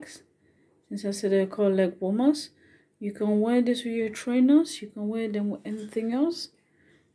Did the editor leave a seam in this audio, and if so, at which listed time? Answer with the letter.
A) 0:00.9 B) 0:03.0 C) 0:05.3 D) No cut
D